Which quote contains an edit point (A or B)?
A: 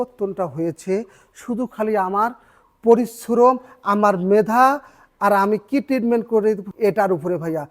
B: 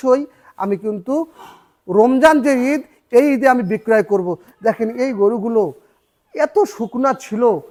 A